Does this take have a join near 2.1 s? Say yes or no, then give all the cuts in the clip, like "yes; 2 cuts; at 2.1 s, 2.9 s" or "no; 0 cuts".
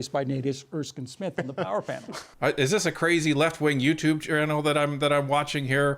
yes; 1 cut; at 2.1 s